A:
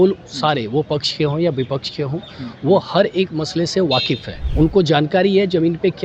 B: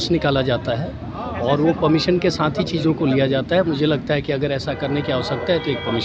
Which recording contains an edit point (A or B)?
A